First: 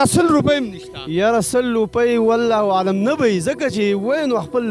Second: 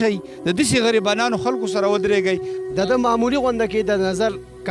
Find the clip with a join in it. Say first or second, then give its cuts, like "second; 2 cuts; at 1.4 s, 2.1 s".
second; 1 cut; at 2.6 s